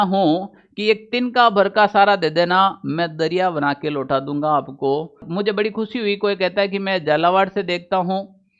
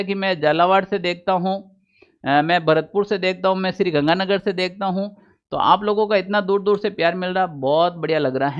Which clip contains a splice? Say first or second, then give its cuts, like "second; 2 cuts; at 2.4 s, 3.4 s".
first; 1 cut; at 5.3 s